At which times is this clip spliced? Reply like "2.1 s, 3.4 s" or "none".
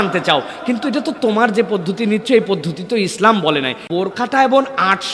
3.9 s